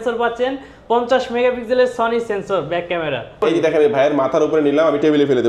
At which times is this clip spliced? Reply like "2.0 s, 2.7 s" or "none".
3.4 s